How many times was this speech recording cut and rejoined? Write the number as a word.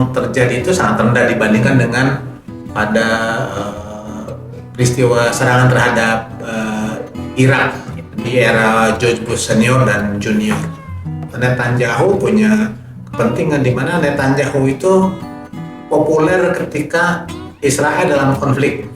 one